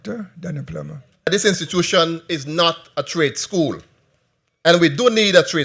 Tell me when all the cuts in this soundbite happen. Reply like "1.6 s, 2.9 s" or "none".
1.3 s